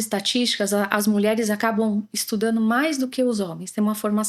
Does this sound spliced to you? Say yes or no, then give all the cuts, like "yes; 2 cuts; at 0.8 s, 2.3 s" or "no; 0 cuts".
no; 0 cuts